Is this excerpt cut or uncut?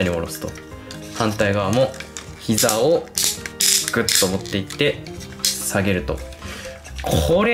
uncut